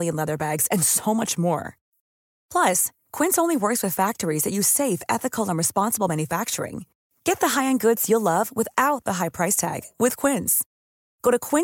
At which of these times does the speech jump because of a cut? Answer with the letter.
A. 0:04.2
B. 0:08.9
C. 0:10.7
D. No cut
D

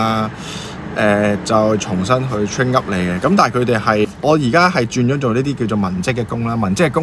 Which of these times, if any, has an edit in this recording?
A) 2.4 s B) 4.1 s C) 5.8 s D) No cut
B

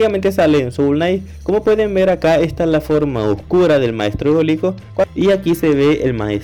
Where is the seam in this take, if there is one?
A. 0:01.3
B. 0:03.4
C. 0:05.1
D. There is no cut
C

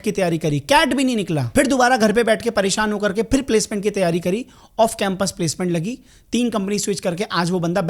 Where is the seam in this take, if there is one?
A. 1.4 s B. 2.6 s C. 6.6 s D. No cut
A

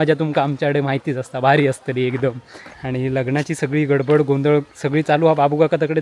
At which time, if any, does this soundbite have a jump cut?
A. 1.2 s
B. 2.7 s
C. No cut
B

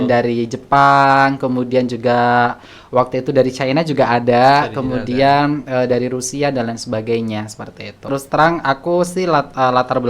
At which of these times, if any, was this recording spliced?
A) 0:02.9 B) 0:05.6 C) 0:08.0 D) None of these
C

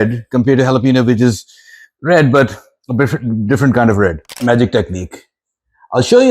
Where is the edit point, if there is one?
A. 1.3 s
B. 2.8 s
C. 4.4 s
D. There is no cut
C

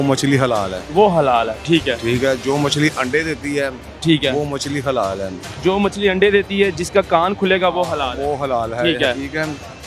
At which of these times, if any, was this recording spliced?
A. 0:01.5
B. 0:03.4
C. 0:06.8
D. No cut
D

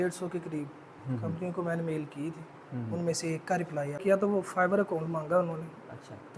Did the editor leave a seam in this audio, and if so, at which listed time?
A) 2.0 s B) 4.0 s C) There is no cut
B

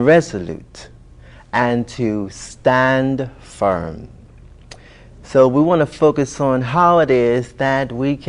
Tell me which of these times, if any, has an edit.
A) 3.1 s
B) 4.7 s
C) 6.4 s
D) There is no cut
A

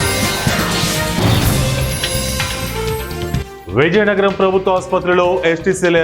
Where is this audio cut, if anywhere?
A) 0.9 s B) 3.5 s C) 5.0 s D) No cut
B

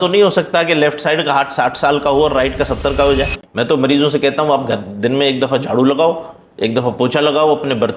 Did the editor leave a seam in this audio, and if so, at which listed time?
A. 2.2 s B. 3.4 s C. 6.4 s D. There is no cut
B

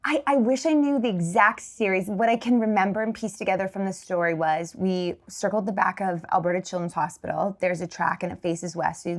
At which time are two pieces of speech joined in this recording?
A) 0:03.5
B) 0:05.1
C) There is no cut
C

